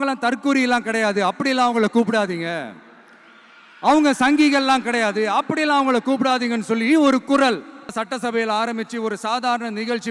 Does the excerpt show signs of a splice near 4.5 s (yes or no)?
no